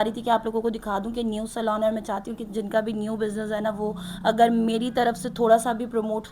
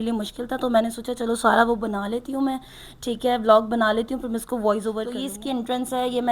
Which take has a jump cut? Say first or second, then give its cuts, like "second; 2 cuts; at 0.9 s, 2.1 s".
second; 1 cut; at 5.2 s